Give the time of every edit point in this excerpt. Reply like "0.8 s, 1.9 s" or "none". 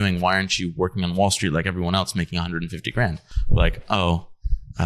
3.3 s